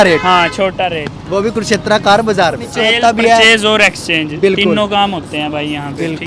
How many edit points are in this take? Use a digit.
1